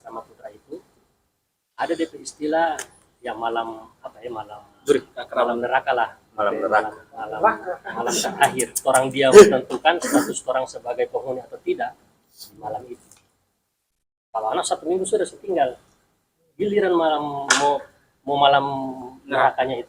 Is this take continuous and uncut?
yes; 0 cuts

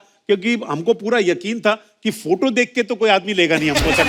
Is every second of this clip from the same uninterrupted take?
yes; 0 cuts

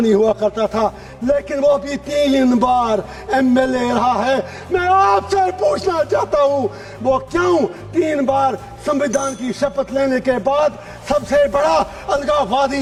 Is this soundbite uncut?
yes; 0 cuts

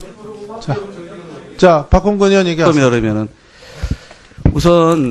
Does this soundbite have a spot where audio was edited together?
no; 0 cuts

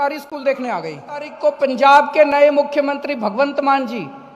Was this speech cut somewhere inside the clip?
yes; 1 cut; at 1.3 s

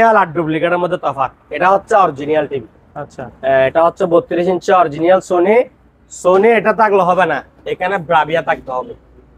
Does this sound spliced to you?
no; 0 cuts

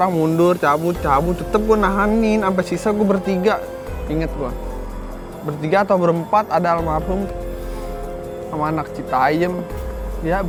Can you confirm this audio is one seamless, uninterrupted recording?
yes; 0 cuts

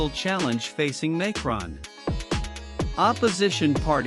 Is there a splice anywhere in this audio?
no; 0 cuts

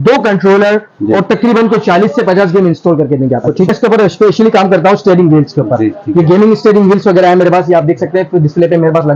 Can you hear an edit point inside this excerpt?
yes; 1 cut; at 3.7 s

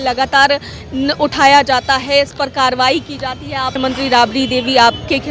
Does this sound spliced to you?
yes; 1 cut; at 3.7 s

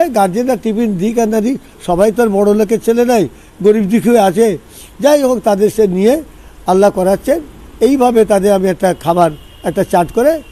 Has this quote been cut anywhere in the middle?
no; 0 cuts

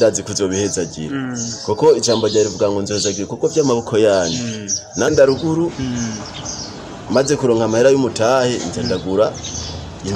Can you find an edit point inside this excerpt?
yes; 1 cut; at 5.1 s

